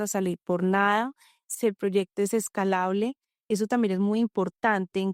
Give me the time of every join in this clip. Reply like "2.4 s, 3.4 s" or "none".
none